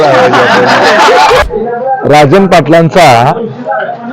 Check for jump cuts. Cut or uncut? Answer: cut